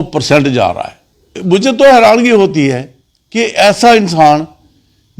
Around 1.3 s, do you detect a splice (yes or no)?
yes